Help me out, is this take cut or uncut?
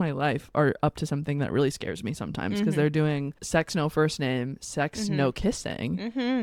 uncut